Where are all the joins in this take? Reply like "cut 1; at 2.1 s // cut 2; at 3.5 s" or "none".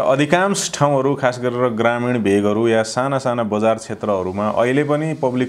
none

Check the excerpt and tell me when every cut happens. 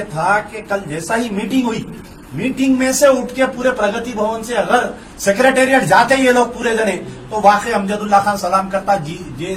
none

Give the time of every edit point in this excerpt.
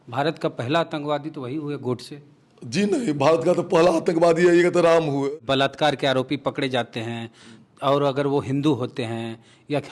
cut 1; at 5.3 s

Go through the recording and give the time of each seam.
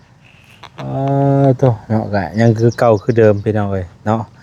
none

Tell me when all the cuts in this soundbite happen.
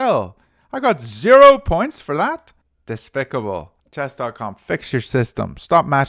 cut 1; at 3.8 s

